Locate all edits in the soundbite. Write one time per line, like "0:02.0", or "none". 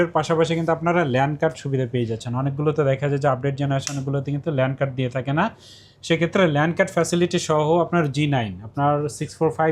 none